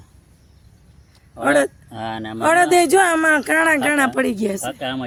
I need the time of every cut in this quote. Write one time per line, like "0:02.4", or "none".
none